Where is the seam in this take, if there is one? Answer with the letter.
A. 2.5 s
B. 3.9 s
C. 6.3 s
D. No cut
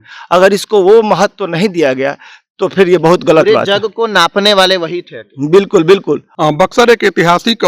C